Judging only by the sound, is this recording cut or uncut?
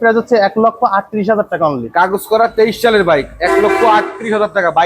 uncut